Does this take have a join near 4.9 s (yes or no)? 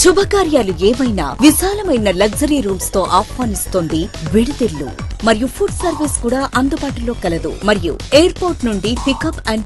no